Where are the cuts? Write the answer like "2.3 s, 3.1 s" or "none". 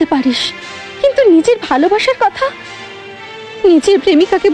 none